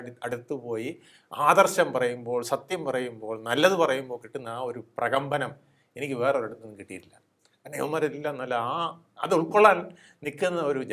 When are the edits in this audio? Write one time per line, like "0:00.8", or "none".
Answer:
none

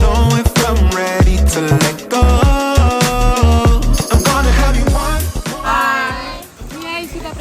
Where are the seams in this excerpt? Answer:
none

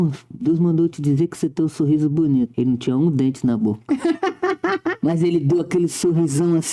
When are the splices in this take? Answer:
0:02.5

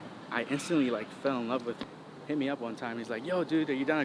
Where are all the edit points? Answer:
0:01.8

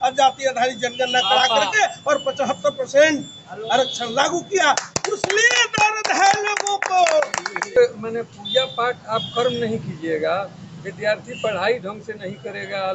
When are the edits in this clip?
0:07.7

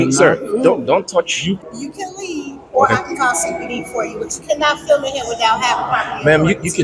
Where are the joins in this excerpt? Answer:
0:01.6

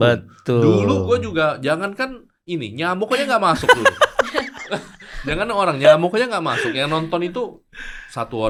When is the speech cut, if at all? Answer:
none

